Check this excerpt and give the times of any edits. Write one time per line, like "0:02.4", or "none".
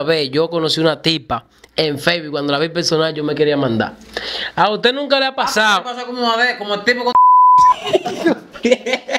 none